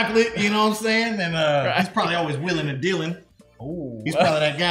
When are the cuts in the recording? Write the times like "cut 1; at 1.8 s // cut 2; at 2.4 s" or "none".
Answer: none